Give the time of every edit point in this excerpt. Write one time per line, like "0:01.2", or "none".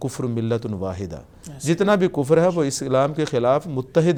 none

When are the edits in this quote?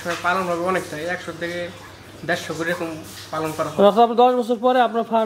none

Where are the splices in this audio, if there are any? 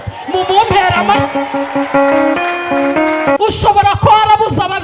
0:03.4

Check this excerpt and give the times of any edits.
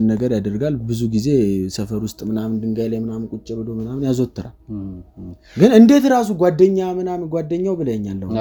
none

